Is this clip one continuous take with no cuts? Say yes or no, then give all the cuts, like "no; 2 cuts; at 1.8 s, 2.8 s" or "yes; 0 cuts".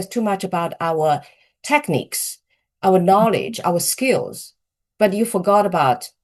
yes; 0 cuts